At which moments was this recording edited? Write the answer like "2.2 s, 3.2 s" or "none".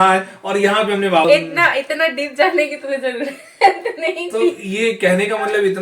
1.2 s